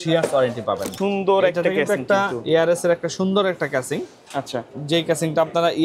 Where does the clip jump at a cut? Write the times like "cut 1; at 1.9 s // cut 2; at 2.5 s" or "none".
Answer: cut 1; at 0.9 s